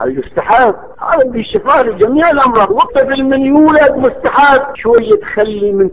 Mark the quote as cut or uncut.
cut